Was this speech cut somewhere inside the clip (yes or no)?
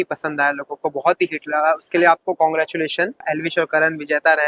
yes